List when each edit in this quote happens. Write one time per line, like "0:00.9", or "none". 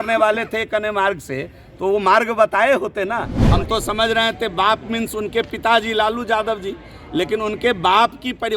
0:03.4